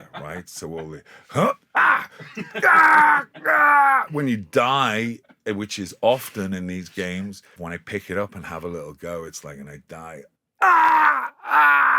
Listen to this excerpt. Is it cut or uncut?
cut